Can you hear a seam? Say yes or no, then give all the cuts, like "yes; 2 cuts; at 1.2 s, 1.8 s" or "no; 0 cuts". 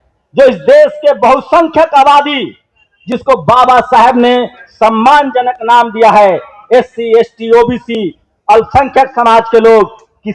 no; 0 cuts